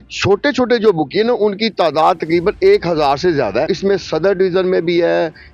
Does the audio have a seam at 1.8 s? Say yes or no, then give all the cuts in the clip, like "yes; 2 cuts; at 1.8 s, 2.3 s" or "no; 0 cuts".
no; 1 cut; at 3.7 s